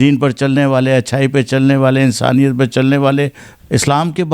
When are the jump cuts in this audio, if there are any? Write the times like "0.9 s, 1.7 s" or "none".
3.4 s